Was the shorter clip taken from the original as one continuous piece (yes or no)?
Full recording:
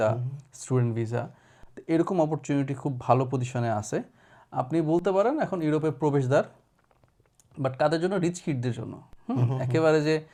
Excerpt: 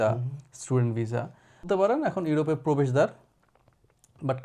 no